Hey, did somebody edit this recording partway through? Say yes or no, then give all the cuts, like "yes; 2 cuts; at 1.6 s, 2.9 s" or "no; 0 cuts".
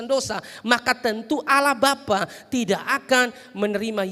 no; 0 cuts